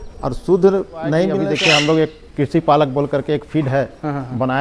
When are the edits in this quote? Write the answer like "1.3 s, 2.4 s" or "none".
1.4 s

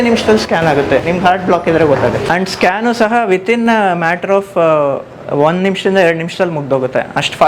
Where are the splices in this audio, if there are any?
2.2 s

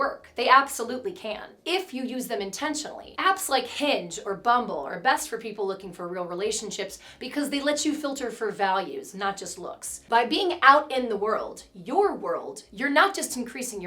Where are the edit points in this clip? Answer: 9.9 s

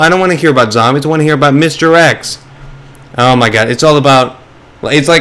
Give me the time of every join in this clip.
none

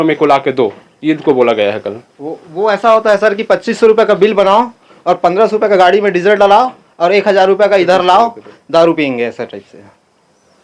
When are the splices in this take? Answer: none

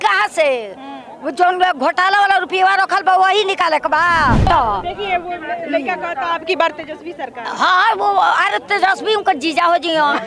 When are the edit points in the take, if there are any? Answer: 4.4 s

